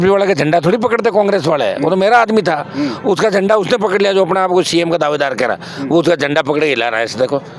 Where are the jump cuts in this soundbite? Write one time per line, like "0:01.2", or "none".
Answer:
none